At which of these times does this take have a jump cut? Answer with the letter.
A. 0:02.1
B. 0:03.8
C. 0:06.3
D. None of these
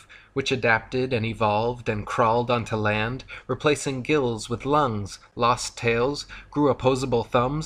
B